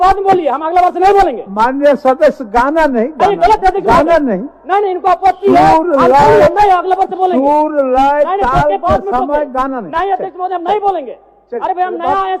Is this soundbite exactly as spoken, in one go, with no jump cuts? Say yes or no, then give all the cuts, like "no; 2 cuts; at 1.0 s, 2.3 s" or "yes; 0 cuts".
yes; 0 cuts